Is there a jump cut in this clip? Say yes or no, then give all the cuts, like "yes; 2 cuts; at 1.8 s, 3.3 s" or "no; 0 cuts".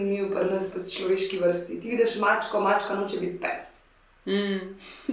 no; 0 cuts